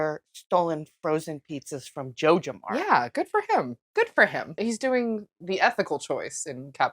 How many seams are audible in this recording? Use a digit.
2